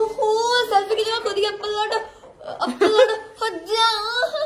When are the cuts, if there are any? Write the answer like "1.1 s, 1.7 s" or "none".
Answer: none

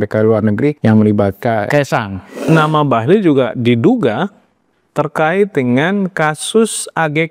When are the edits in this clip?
0.8 s, 1.8 s

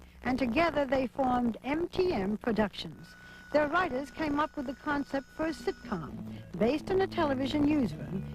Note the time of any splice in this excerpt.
none

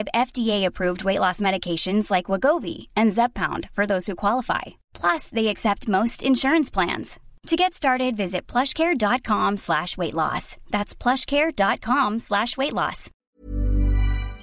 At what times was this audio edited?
13.1 s

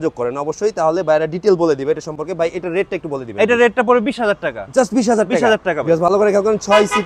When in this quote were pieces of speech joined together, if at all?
none

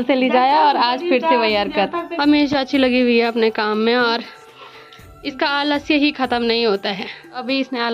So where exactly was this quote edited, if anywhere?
none

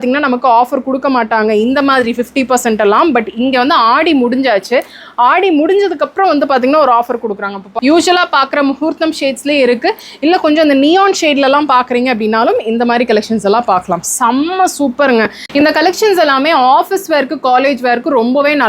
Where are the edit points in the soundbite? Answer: 7.6 s, 15.5 s

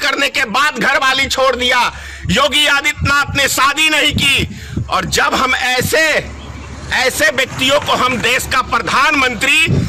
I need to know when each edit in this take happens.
none

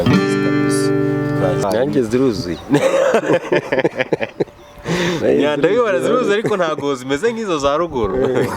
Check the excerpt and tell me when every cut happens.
1.6 s

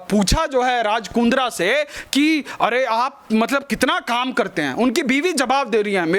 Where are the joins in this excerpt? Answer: none

